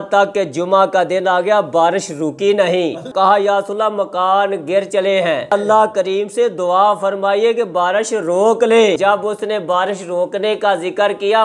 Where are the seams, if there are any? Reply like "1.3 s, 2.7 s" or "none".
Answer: 3.1 s, 5.5 s, 9.0 s